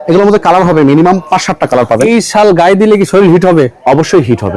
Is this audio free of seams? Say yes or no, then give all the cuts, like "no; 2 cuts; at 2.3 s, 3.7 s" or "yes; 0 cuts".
no; 1 cut; at 2.0 s